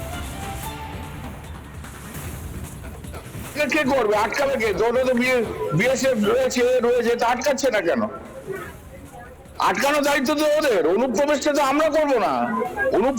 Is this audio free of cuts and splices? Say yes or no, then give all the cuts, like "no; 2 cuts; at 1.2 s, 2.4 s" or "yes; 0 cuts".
no; 3 cuts; at 1.2 s, 2.4 s, 3.6 s